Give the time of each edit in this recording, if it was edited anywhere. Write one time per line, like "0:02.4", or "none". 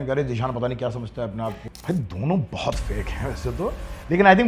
0:01.5